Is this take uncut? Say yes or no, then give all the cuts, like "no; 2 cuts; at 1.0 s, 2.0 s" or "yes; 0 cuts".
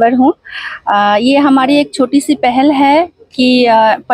yes; 0 cuts